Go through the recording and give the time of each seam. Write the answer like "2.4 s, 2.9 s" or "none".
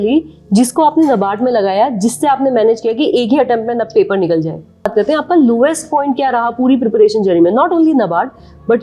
4.9 s